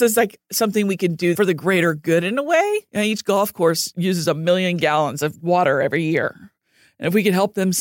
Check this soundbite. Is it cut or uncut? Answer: cut